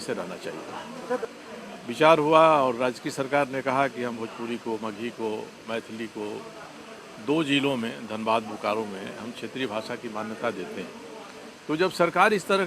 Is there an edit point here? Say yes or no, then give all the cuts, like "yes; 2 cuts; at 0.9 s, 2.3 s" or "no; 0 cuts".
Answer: yes; 1 cut; at 1.2 s